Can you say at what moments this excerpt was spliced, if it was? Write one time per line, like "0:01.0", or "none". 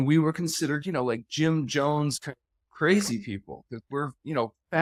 none